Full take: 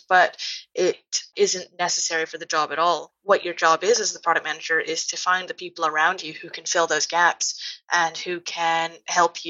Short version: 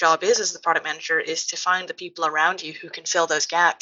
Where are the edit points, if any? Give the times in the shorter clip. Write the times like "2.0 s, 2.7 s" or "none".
none